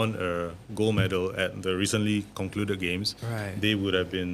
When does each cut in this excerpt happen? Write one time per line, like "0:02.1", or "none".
0:02.3